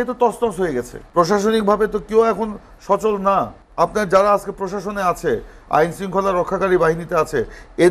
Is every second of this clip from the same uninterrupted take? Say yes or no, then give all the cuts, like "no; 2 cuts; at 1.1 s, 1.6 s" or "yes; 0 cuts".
no; 2 cuts; at 1.0 s, 3.6 s